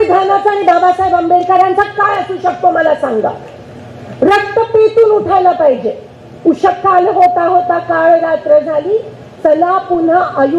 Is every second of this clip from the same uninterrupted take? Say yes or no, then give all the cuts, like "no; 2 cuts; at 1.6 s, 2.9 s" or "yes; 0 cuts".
yes; 0 cuts